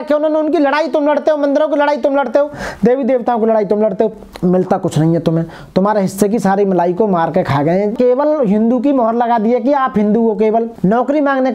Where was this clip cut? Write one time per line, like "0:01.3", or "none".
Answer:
0:07.9
0:10.7